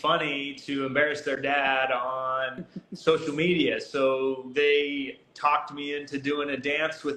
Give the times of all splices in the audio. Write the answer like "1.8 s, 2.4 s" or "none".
none

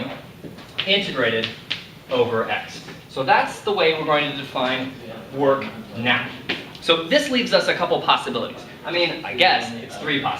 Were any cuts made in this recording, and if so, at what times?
4.4 s

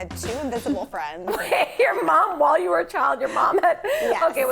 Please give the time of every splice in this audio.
none

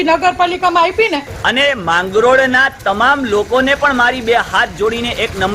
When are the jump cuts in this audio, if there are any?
1.4 s

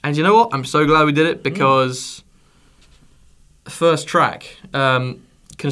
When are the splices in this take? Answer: none

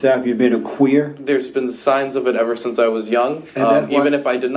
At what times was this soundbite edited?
1.2 s, 3.4 s

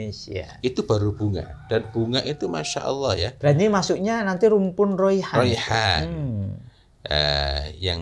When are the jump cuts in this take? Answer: none

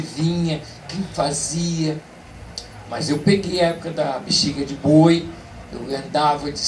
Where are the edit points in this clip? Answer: none

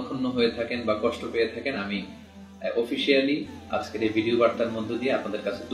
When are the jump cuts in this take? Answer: none

